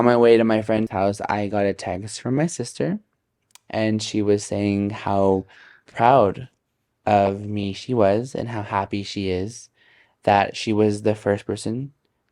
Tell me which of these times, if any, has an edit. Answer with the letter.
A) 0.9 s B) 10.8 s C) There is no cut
A